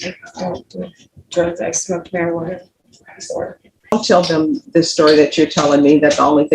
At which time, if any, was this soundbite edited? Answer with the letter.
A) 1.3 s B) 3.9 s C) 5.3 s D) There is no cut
B